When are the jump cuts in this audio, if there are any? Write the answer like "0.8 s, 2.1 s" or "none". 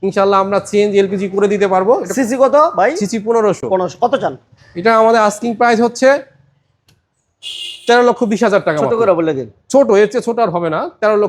none